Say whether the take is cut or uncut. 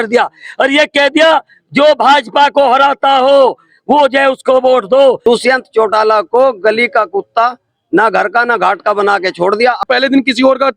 cut